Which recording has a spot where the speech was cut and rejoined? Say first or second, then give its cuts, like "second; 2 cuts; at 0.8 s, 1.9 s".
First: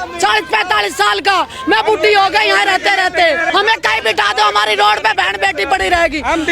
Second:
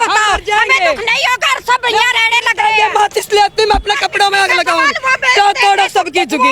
first; 1 cut; at 3.5 s